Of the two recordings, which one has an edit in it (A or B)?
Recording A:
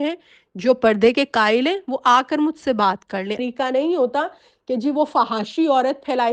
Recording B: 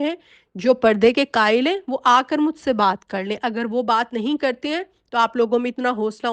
A